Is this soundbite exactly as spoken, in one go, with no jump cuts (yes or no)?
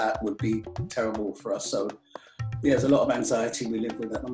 yes